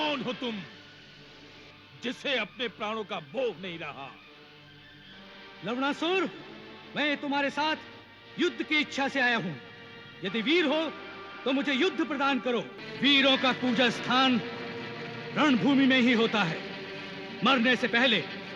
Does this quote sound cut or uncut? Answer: cut